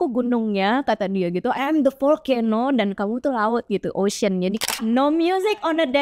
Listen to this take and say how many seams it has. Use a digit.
1